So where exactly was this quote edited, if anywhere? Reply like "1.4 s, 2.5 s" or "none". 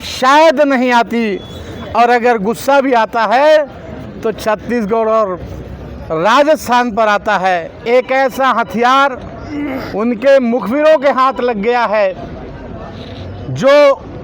7.7 s